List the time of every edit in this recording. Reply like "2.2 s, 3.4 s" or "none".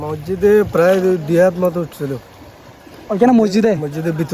none